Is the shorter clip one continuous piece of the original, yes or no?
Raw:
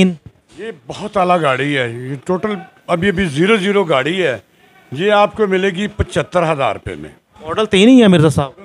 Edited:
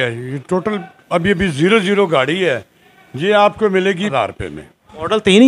no